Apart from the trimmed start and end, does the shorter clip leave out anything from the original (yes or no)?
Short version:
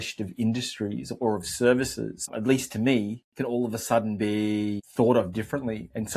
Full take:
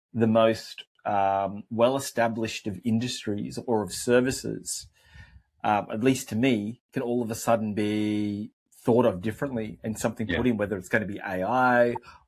yes